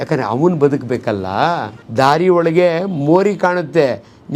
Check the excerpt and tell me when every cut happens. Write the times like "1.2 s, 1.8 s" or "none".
1.8 s